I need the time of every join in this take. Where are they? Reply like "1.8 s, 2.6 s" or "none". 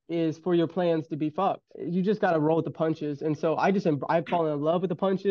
1.7 s